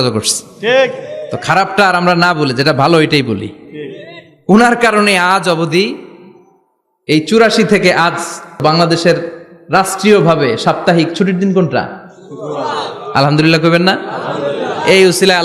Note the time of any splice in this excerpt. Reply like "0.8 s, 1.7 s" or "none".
8.6 s